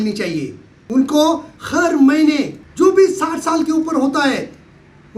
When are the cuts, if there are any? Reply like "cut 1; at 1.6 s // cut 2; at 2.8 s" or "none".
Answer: cut 1; at 1.5 s // cut 2; at 2.6 s